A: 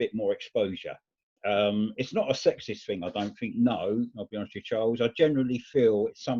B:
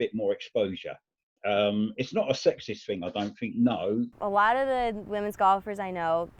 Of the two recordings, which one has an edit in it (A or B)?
B